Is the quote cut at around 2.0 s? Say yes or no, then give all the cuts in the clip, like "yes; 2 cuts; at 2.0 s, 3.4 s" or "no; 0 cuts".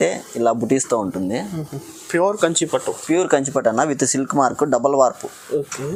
no; 0 cuts